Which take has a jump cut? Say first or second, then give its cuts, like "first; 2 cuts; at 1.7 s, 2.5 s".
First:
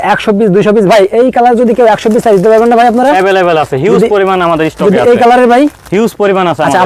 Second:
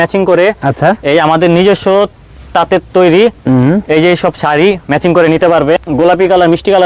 second; 1 cut; at 5.8 s